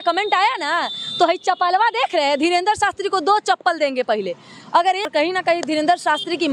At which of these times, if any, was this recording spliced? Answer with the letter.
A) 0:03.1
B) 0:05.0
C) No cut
B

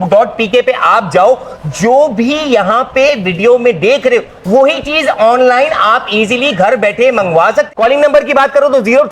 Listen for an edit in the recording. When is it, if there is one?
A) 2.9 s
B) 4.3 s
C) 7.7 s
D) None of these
C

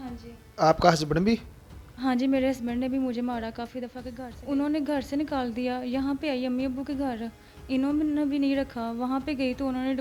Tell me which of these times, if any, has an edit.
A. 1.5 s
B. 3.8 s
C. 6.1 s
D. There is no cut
B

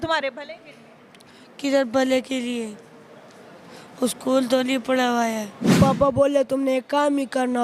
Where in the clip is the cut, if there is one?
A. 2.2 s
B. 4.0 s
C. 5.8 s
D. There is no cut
C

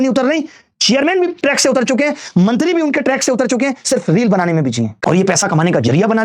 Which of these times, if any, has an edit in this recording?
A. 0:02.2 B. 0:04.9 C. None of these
B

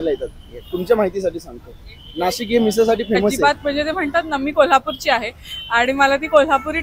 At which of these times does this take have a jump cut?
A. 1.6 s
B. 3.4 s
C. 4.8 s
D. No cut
B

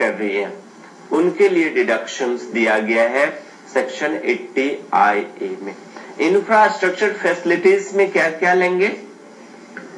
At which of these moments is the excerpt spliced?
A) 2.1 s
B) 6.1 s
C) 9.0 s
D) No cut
A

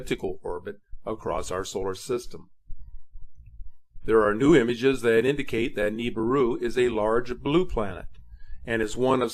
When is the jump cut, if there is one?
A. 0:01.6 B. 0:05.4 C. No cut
C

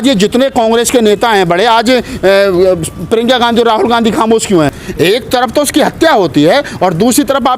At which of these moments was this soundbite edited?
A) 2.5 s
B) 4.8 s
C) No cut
B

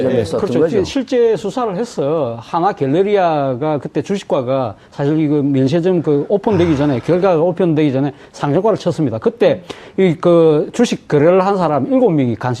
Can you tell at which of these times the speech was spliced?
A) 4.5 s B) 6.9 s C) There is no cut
A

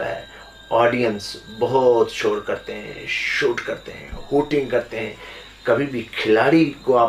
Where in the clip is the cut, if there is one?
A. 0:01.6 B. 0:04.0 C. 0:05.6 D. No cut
D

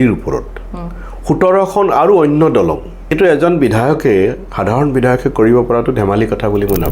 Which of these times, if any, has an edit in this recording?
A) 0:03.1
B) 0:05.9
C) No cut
A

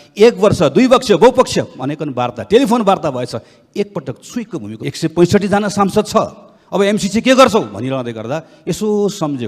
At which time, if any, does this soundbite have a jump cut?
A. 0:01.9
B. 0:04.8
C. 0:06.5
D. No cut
B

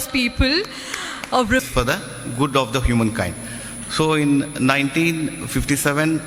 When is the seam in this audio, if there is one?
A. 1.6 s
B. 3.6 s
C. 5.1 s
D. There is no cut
A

